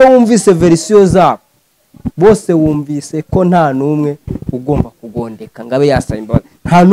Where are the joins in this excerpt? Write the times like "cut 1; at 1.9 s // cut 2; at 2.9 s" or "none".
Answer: none